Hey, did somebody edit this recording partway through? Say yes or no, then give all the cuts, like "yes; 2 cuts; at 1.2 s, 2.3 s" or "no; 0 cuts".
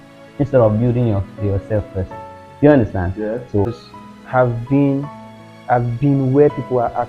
yes; 1 cut; at 3.7 s